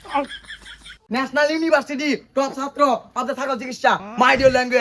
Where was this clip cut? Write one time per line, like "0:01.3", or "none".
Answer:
0:00.9